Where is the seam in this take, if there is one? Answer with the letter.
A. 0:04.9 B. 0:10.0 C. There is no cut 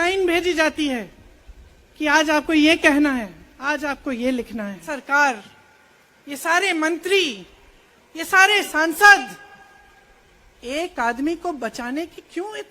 A